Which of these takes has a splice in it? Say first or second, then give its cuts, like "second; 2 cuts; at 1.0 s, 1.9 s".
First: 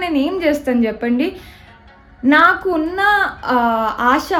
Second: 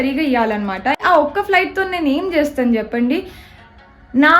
second; 1 cut; at 1.0 s